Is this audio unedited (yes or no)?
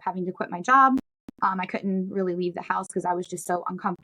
yes